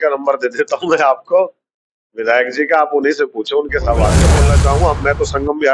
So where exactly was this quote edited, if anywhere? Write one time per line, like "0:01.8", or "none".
0:04.4

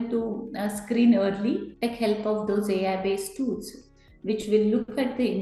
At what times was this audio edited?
0:01.7

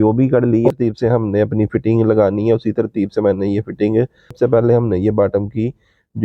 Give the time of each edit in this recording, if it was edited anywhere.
0:00.7
0:04.3

